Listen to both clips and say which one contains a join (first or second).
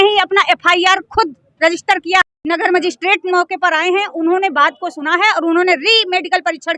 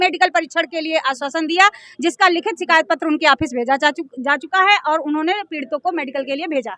first